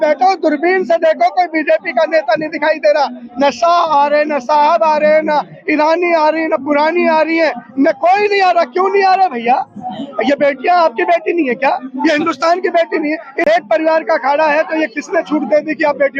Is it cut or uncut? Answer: cut